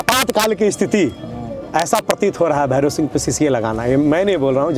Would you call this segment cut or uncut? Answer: uncut